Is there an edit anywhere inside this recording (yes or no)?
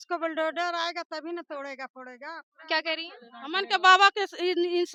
no